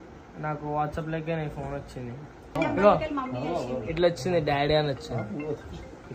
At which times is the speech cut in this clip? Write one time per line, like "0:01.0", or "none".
0:02.5